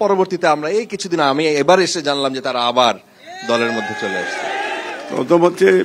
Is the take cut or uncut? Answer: uncut